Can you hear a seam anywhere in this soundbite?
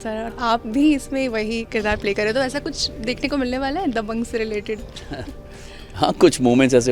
no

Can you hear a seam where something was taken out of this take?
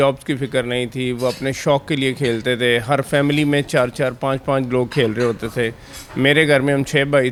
no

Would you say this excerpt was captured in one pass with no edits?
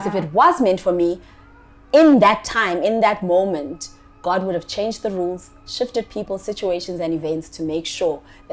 yes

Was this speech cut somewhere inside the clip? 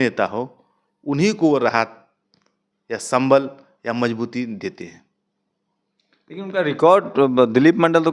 no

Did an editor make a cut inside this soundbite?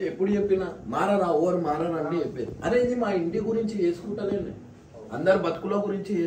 no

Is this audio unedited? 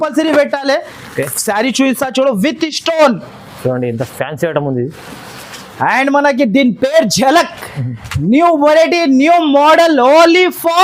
yes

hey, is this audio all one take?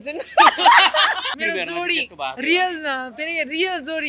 no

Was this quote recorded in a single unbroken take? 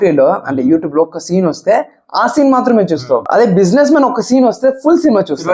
yes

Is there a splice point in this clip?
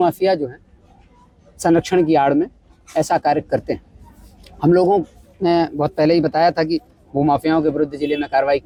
no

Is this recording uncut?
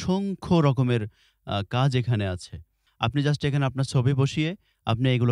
no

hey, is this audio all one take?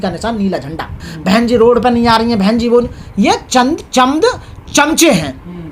no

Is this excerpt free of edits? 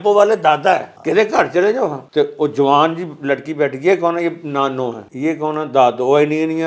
no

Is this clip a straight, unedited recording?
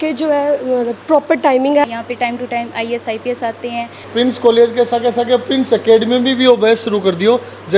no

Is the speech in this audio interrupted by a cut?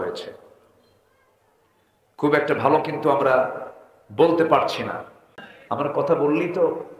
yes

